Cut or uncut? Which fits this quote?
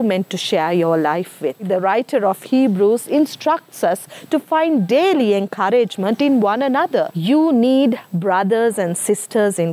cut